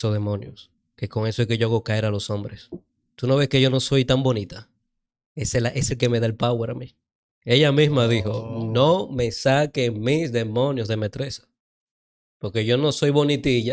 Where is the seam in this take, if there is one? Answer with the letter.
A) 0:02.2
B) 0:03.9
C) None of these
C